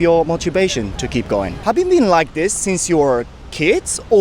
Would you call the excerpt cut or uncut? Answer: cut